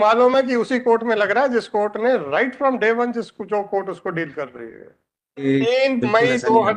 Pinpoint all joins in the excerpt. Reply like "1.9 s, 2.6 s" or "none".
5.4 s